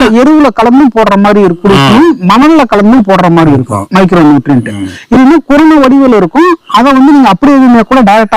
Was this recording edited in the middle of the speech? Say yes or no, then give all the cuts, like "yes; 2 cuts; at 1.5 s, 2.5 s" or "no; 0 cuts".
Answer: no; 0 cuts